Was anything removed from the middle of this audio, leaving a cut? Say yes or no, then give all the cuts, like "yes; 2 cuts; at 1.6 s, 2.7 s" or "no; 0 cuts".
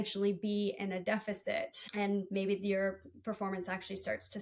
yes; 1 cut; at 1.8 s